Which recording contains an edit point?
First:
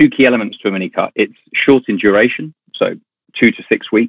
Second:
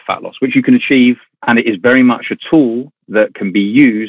second; 1 cut; at 1.3 s

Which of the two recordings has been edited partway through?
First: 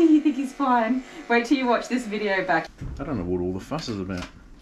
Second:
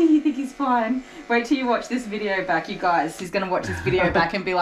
first; 1 cut; at 2.7 s

